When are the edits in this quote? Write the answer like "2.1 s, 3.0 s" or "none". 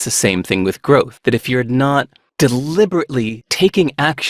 1.1 s, 2.2 s, 3.4 s